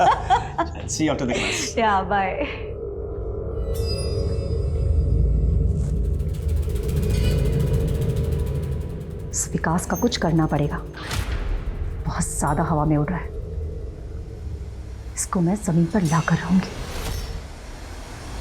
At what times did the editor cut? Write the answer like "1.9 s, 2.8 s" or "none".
17.4 s